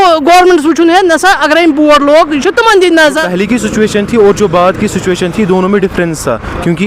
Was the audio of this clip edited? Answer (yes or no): yes